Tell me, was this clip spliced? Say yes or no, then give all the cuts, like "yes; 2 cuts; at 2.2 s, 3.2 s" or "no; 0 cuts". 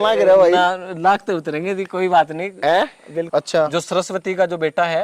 yes; 1 cut; at 3.3 s